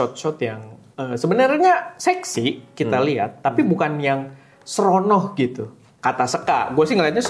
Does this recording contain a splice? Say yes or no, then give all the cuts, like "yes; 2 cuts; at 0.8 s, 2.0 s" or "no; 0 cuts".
no; 0 cuts